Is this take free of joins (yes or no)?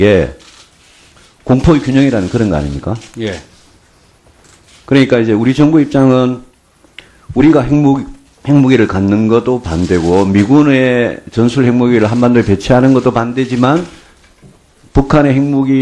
no